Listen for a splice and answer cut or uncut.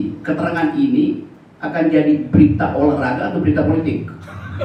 uncut